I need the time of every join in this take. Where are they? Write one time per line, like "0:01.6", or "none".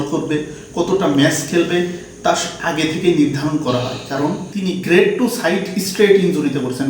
0:04.5